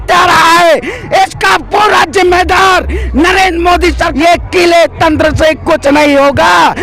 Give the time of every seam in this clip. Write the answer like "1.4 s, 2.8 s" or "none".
4.1 s